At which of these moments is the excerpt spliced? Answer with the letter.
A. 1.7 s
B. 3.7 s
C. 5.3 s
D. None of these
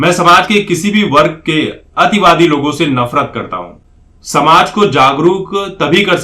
B